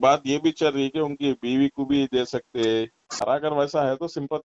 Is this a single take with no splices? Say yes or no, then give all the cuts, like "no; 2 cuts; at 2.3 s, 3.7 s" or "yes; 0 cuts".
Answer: no; 1 cut; at 3.2 s